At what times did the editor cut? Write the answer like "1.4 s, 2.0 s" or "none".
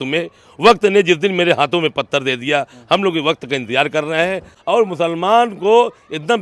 4.5 s